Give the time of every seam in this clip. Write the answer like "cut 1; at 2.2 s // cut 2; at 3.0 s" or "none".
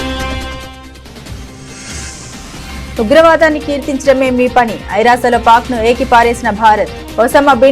cut 1; at 2.0 s